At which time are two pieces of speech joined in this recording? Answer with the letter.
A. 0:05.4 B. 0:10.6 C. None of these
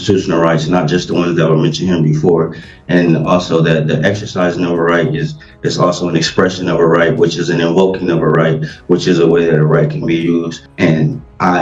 B